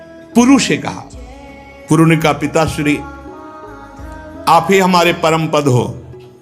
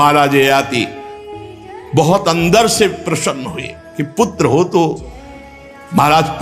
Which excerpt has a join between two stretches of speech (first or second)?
first